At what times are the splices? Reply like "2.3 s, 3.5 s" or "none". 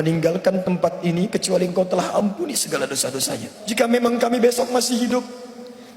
3.6 s